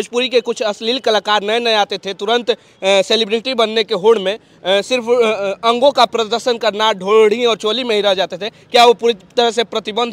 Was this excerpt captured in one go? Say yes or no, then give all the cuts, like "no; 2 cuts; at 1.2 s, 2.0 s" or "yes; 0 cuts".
yes; 0 cuts